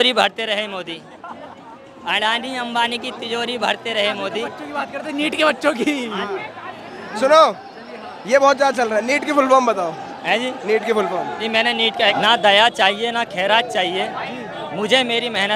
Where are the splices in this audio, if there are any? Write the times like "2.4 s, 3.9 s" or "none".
12.1 s